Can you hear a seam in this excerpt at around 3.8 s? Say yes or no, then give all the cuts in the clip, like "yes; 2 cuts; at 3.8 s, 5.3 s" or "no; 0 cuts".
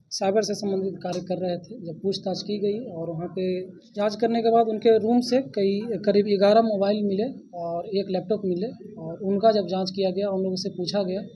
yes; 1 cut; at 3.8 s